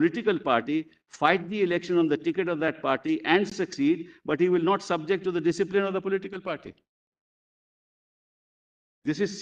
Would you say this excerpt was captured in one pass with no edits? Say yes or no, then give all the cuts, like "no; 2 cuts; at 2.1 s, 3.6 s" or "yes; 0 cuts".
yes; 0 cuts